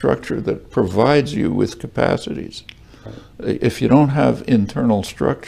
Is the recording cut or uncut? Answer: uncut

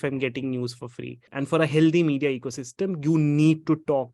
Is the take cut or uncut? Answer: cut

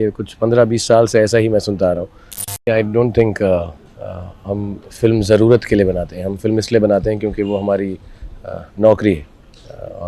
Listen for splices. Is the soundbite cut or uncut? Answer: cut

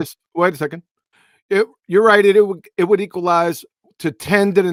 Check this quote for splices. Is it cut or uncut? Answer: uncut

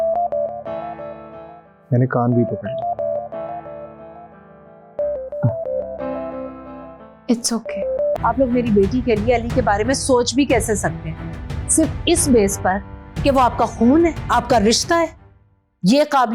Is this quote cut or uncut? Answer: cut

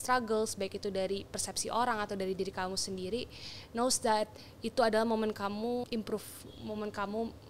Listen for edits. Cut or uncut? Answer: cut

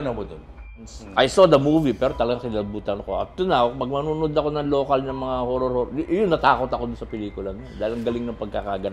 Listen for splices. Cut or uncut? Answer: cut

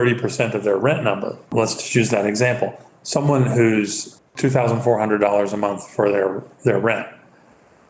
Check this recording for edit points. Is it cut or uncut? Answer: cut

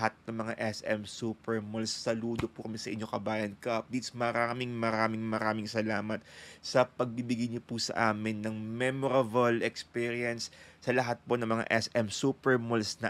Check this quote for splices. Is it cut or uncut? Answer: uncut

